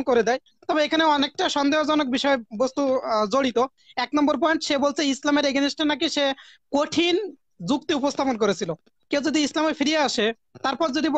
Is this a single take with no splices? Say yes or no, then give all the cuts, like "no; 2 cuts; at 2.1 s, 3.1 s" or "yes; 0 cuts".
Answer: yes; 0 cuts